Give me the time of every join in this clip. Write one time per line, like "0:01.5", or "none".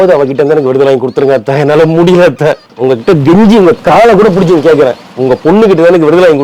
0:02.7